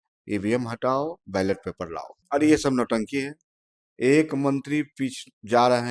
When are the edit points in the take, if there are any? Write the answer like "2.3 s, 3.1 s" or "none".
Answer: 2.1 s